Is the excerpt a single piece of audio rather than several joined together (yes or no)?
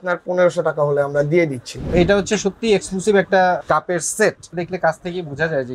no